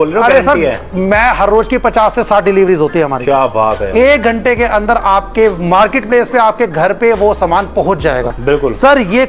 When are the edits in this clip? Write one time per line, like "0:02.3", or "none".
0:08.3

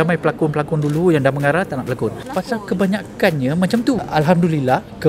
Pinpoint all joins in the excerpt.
0:02.2
0:04.1

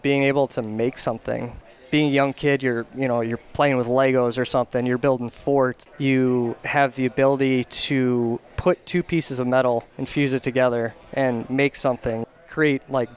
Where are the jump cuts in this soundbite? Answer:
0:05.8
0:08.5
0:10.0
0:12.2

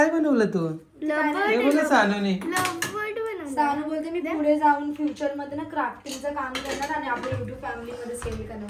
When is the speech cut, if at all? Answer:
none

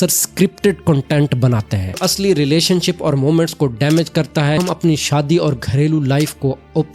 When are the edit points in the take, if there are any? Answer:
0:02.0
0:04.6

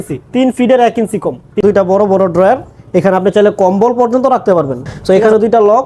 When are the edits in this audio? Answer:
0:01.6
0:04.9

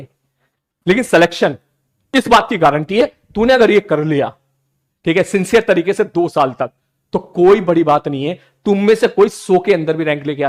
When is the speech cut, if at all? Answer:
none

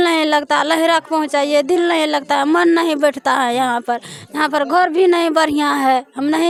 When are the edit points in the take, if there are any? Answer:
none

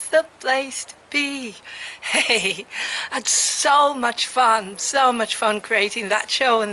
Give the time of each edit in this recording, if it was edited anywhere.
0:02.5

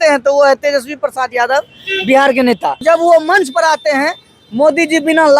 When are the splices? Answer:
0:02.8

